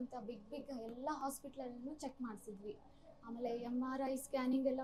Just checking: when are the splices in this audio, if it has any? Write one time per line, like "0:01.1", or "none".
none

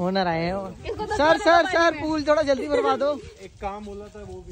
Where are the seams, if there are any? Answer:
none

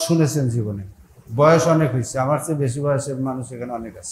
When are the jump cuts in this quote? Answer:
none

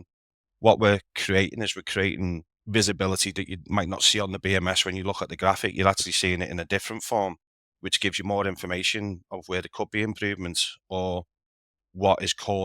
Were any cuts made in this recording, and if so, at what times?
none

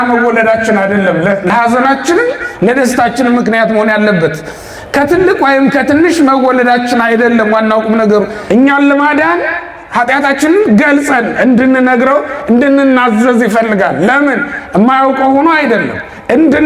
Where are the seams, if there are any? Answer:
0:08.4

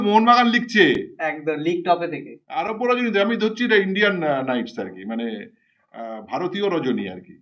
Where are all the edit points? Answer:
none

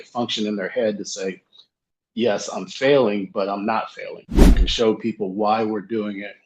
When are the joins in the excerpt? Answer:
0:04.6

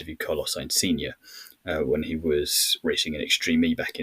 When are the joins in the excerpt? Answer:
0:02.7

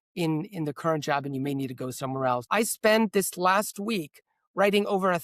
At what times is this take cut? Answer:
0:02.4

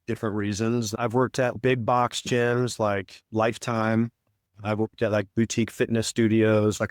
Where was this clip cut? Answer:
0:01.5

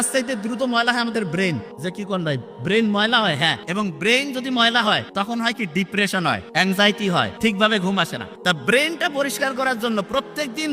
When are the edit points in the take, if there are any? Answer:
0:01.7
0:03.6
0:05.1
0:06.5
0:07.3
0:08.2

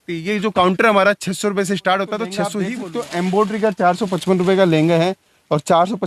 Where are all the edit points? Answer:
0:02.6

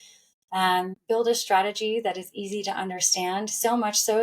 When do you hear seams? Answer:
0:01.0

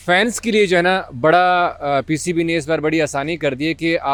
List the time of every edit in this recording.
none

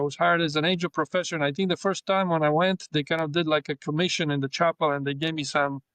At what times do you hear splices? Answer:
none

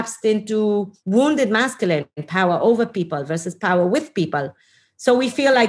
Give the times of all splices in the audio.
0:01.0
0:02.2

